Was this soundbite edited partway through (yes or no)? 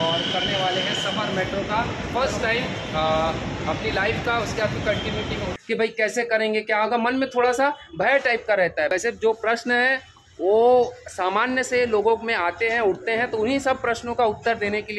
yes